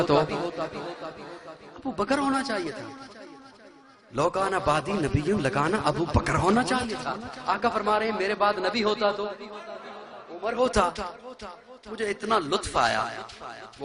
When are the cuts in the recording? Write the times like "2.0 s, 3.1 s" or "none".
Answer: 4.0 s